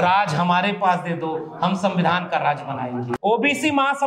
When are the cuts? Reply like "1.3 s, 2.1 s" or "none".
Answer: 3.1 s

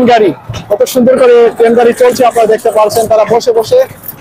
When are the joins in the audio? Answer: none

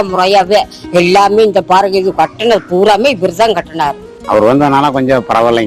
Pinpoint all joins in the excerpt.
4.1 s

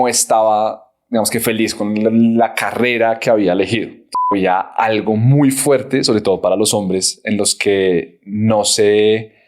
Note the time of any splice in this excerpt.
4.3 s

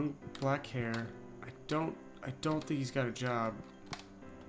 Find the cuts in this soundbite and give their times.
none

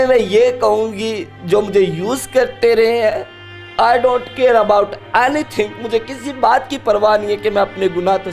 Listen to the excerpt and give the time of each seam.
none

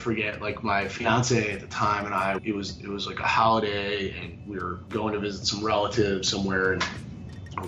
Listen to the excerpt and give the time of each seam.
2.4 s

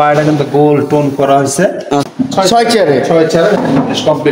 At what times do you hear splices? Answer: 2.1 s

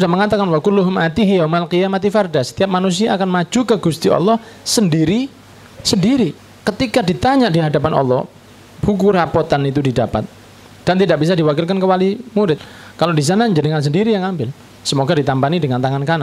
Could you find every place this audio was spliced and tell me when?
6.5 s, 12.7 s

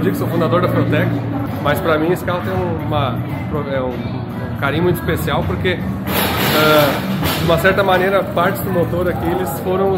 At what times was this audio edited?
1.5 s

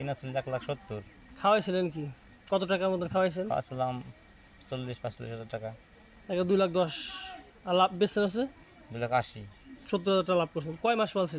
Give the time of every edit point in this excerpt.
none

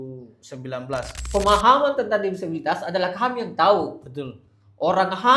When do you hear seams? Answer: 1.2 s

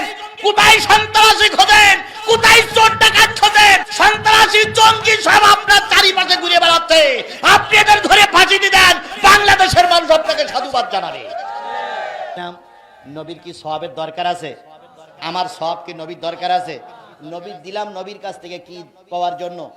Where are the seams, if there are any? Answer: 3.9 s, 12.4 s

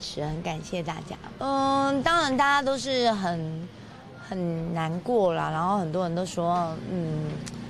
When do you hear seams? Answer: 1.3 s

